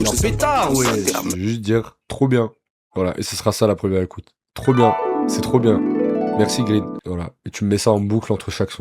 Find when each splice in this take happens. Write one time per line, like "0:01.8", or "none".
0:01.3